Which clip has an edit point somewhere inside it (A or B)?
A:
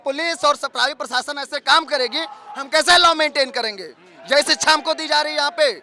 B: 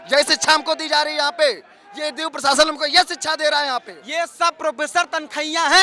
B